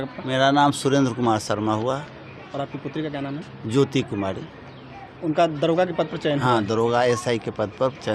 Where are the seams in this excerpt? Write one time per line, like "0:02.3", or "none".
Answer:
none